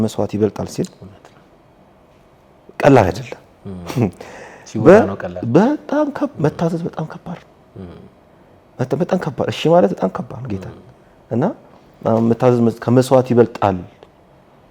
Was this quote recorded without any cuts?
yes; 0 cuts

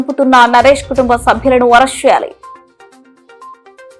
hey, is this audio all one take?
yes; 0 cuts

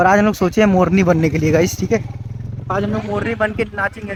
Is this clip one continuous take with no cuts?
yes; 0 cuts

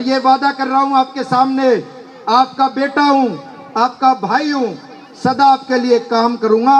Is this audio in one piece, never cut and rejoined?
yes; 0 cuts

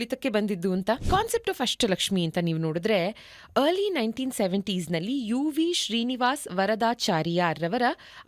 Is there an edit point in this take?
yes; 1 cut; at 1.0 s

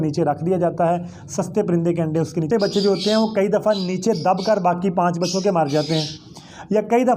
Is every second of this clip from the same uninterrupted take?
no; 1 cut; at 2.5 s

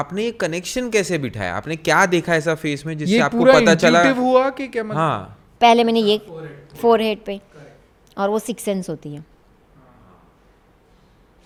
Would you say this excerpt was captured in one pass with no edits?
yes; 0 cuts

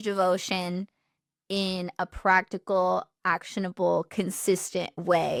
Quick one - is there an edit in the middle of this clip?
no; 0 cuts

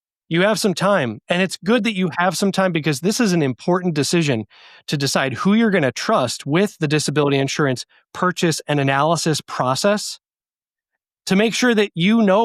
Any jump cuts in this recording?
no; 0 cuts

